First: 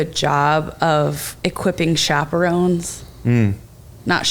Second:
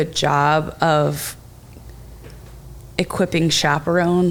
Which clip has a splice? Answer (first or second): first